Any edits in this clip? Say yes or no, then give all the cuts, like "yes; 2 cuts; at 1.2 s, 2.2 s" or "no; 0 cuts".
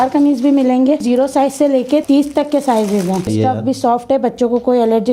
yes; 3 cuts; at 1.0 s, 2.0 s, 3.3 s